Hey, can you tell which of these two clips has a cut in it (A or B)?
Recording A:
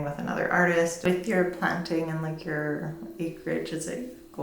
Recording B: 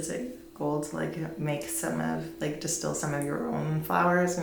A